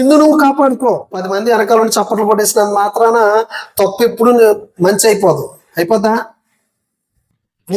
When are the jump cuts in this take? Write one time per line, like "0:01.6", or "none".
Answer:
0:01.2